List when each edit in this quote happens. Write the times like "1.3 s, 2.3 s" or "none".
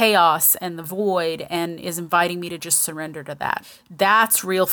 3.7 s